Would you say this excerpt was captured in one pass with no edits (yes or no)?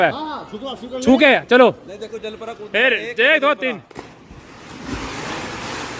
yes